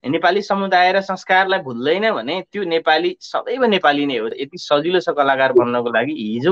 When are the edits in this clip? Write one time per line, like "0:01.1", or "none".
0:04.3

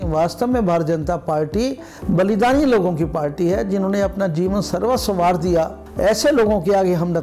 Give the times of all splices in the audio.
0:01.9
0:05.8

